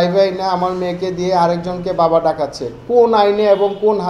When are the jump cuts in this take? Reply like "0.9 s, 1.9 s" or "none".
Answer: none